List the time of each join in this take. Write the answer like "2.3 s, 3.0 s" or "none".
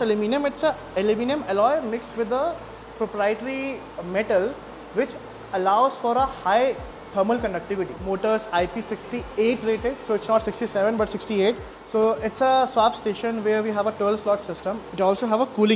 8.0 s, 11.7 s, 14.8 s